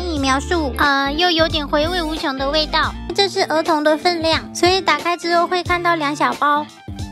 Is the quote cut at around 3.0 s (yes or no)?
yes